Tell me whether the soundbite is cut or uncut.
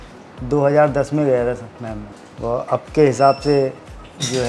cut